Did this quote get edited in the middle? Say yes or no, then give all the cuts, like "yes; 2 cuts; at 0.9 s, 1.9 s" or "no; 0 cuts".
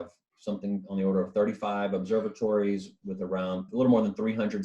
yes; 1 cut; at 3.7 s